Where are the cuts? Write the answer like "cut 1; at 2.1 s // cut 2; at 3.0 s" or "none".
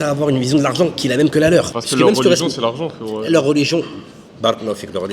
cut 1; at 1.8 s